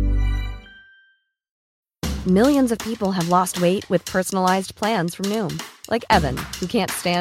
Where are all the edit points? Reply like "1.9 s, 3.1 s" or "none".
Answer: 1.6 s